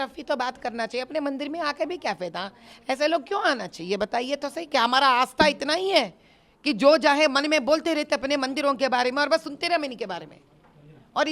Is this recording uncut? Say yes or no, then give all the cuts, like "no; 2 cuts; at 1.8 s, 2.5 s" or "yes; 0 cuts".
yes; 0 cuts